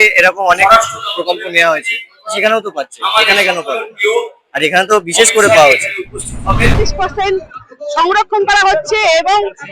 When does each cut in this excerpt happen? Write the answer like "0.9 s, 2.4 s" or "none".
6.7 s